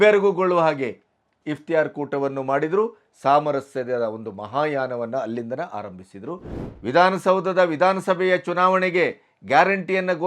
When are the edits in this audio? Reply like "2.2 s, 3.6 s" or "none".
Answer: 6.6 s